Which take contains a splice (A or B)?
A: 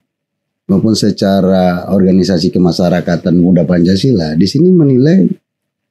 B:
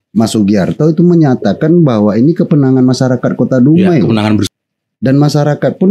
B